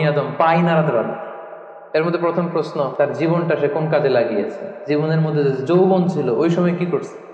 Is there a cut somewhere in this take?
yes; 3 cuts; at 1.7 s, 3.0 s, 4.7 s

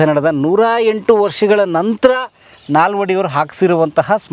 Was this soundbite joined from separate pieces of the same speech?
no; 0 cuts

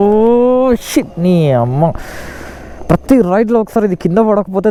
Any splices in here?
no; 0 cuts

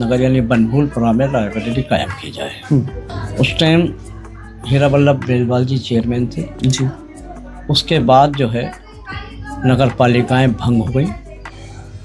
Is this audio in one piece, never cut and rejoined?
yes; 0 cuts

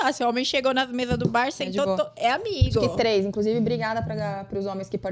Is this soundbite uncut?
yes; 0 cuts

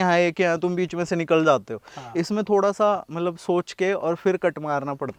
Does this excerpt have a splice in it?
no; 0 cuts

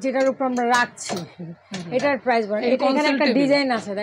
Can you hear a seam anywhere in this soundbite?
no; 0 cuts

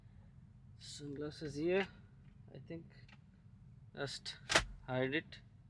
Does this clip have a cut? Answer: no; 0 cuts

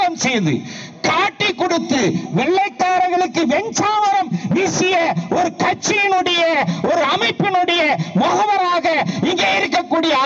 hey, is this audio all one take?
yes; 0 cuts

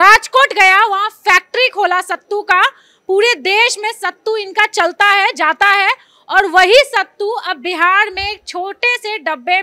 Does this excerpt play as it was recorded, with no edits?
yes; 0 cuts

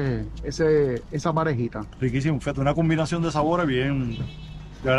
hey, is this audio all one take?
yes; 0 cuts

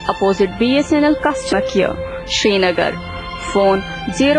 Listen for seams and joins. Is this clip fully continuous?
no; 1 cut; at 1.5 s

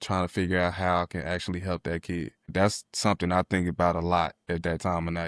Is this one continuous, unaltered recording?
no; 2 cuts; at 2.5 s, 4.4 s

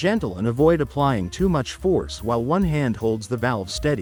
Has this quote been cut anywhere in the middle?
no; 0 cuts

